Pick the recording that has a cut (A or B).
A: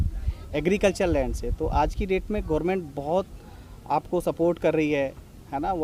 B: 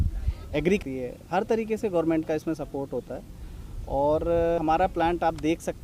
B